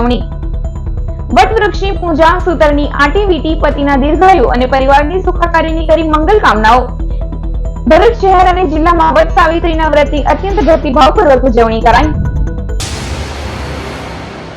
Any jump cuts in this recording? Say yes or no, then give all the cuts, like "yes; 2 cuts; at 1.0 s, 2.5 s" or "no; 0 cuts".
yes; 1 cut; at 12.8 s